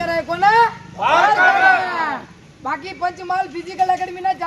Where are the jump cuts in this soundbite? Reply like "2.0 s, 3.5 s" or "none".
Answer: none

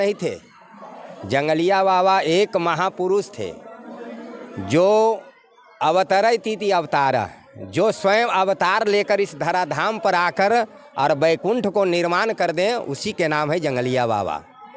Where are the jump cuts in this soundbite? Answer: none

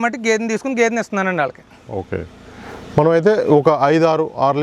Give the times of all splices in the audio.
none

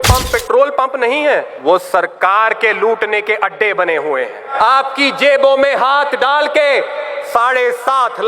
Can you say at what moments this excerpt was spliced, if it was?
1.5 s, 4.5 s

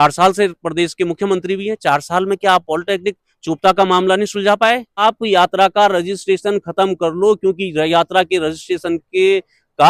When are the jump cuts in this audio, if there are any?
5.0 s

